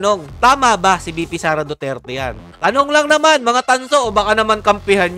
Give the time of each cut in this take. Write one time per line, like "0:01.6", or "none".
0:02.4